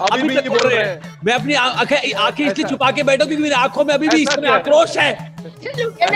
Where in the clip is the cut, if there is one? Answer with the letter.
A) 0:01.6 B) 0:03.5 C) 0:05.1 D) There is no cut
D